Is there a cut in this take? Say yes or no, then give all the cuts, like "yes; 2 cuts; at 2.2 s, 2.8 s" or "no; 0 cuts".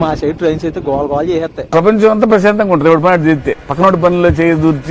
yes; 1 cut; at 1.7 s